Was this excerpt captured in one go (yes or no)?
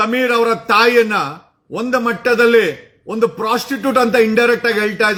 yes